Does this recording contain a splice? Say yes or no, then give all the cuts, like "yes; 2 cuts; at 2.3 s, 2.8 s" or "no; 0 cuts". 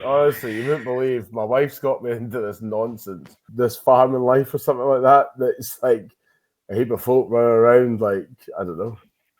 yes; 1 cut; at 3.4 s